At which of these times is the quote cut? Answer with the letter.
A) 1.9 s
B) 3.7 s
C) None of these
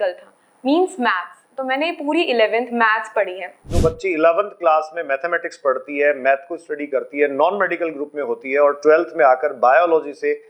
B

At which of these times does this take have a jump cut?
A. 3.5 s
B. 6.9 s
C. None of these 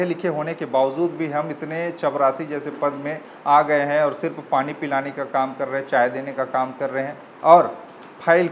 C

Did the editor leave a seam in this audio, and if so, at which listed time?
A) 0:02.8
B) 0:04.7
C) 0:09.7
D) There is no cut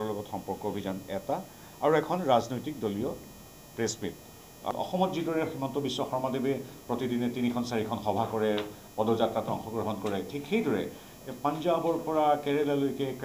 B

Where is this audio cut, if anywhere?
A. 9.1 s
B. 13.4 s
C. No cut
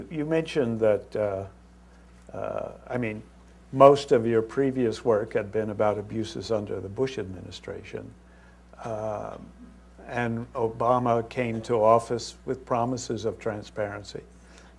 A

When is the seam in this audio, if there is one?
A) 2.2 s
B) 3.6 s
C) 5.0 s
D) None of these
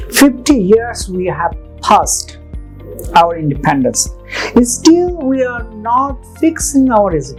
D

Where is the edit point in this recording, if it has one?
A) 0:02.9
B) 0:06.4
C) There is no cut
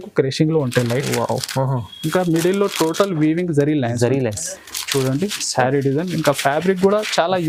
C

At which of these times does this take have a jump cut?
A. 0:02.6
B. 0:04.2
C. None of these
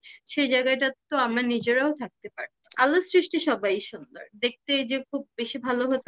A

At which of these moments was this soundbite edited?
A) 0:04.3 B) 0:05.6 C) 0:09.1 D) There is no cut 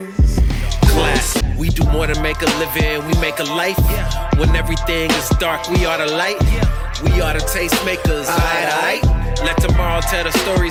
D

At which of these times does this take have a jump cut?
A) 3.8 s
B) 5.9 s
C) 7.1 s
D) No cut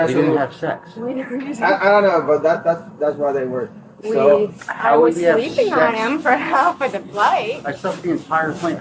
A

